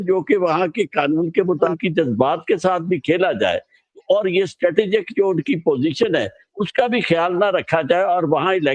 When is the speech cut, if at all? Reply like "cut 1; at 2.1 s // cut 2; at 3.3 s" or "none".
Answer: cut 1; at 1.7 s